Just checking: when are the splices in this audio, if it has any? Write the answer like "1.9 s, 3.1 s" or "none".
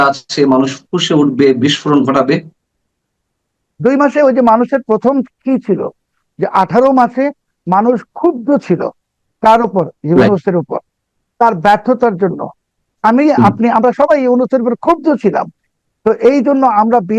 none